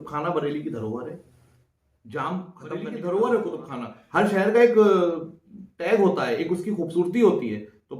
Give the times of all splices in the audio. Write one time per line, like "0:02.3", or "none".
0:02.8